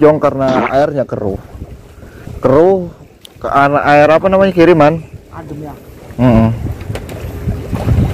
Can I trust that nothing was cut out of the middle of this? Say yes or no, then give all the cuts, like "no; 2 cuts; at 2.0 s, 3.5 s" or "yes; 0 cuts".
yes; 0 cuts